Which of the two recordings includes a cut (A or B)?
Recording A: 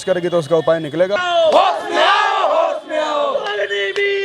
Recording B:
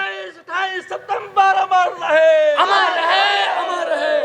A